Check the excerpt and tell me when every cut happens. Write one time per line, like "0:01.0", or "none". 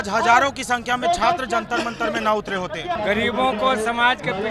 0:03.0